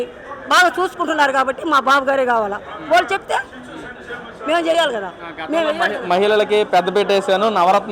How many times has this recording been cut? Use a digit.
0